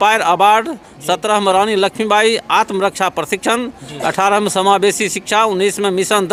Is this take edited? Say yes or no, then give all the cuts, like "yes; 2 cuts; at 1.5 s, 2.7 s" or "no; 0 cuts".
no; 0 cuts